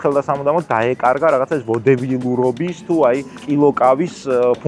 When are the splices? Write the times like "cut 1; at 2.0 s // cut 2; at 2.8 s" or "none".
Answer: cut 1; at 3.4 s